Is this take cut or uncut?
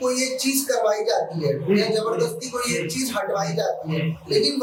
uncut